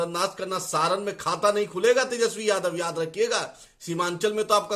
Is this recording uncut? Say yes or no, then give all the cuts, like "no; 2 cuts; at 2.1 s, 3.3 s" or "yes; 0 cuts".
yes; 0 cuts